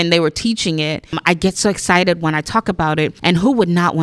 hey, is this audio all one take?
no; 2 cuts; at 1.2 s, 3.2 s

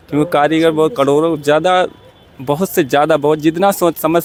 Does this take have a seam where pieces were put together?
no; 0 cuts

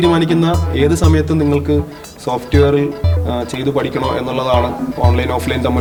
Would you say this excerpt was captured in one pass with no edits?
yes; 0 cuts

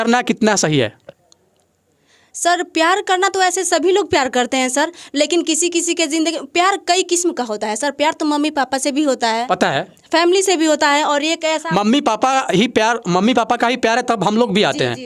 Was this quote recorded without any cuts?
yes; 0 cuts

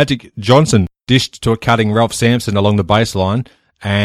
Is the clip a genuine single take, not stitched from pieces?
no; 1 cut; at 1.0 s

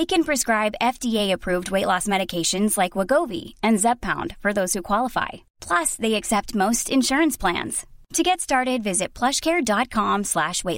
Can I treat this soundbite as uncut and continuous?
yes; 0 cuts

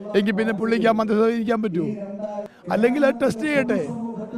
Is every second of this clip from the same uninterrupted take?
no; 1 cut; at 2.5 s

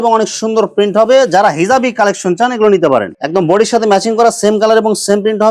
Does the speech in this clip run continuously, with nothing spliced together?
no; 1 cut; at 3.2 s

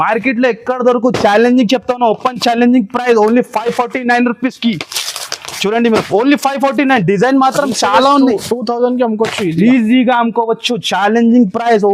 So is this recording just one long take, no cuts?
yes; 0 cuts

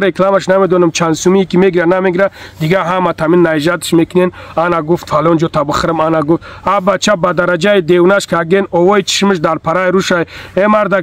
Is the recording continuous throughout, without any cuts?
yes; 0 cuts

